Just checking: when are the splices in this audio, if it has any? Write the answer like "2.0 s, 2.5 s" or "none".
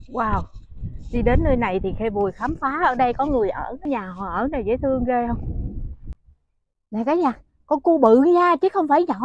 3.8 s, 6.2 s